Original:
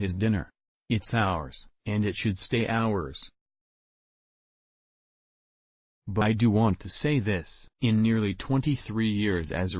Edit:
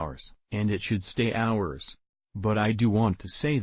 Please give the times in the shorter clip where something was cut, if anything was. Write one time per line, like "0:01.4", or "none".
0:02.6